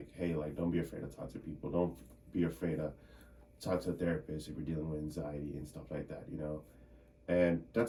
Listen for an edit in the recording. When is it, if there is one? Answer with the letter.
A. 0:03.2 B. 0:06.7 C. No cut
C